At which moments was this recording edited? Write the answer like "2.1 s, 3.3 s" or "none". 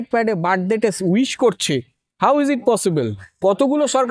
none

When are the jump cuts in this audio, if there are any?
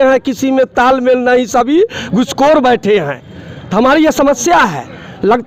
none

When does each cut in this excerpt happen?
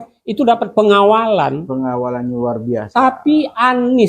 none

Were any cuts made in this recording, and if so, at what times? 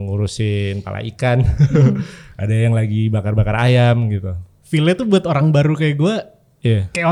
none

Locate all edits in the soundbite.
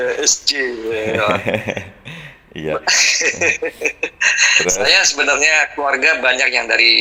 none

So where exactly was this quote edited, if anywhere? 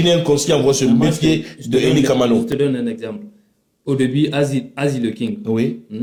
none

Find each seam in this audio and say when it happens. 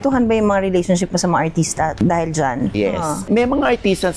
2.7 s

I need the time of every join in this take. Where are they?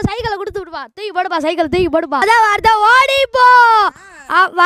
2.2 s

